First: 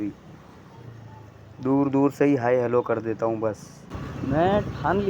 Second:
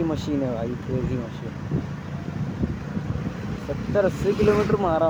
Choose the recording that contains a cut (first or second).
first